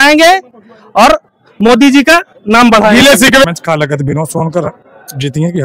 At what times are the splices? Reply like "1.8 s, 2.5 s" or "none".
3.4 s